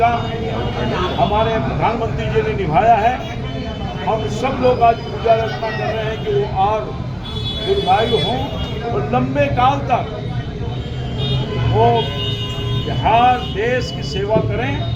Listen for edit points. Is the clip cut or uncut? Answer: uncut